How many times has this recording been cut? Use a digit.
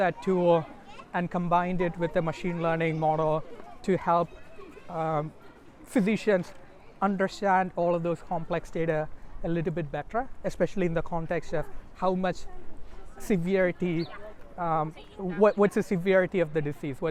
0